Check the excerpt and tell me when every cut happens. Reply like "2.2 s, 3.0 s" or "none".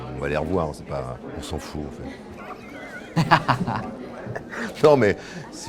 1.3 s